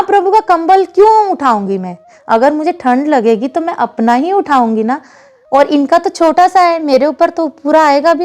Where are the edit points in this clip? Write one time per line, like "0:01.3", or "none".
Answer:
none